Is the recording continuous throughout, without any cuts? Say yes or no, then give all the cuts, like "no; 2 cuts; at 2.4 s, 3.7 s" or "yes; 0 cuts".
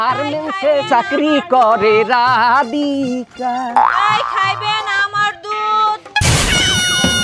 yes; 0 cuts